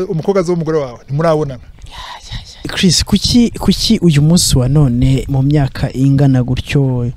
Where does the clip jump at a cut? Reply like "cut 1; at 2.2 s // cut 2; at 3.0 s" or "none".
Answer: cut 1; at 2.7 s

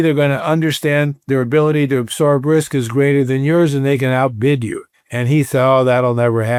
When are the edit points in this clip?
none

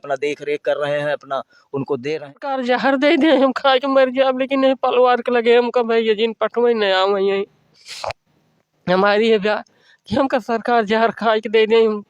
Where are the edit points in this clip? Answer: cut 1; at 2.6 s

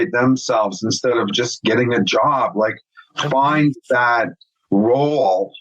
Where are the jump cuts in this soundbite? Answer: cut 1; at 1.3 s

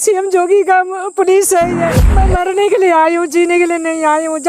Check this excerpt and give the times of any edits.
cut 1; at 2.1 s

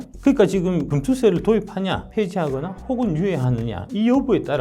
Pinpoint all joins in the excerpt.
cut 1; at 0.9 s // cut 2; at 2.0 s

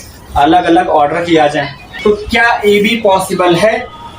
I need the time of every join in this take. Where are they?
cut 1; at 1.9 s

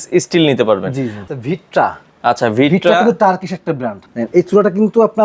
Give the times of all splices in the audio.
cut 1; at 1.3 s // cut 2; at 4.1 s

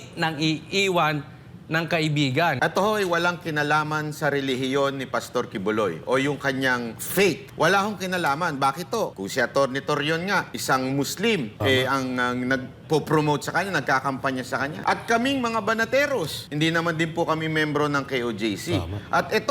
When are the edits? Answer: cut 1; at 2.6 s // cut 2; at 7.2 s // cut 3; at 9.2 s // cut 4; at 10.5 s // cut 5; at 11.5 s // cut 6; at 14.8 s // cut 7; at 16.4 s

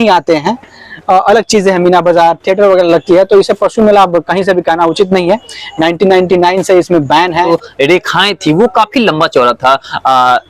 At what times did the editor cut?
cut 1; at 7.5 s

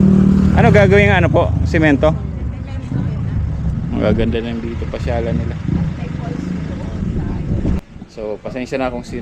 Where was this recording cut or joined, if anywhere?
cut 1; at 7.8 s

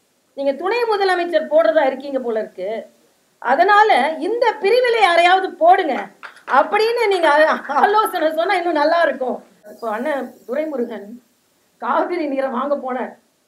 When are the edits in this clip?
cut 1; at 9.7 s

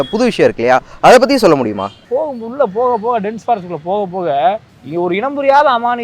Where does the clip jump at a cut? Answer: cut 1; at 2.0 s // cut 2; at 4.7 s

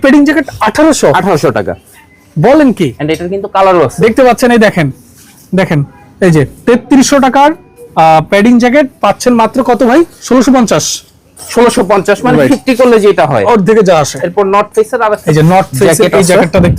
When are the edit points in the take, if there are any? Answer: none

